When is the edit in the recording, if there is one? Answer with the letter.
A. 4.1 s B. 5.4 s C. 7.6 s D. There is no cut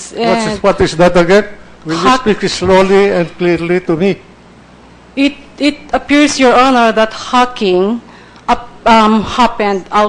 D